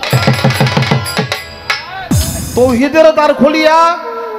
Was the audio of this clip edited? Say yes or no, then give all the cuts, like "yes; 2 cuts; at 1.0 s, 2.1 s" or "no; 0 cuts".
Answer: yes; 1 cut; at 2.3 s